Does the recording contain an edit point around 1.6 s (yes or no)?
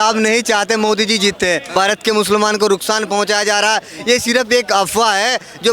yes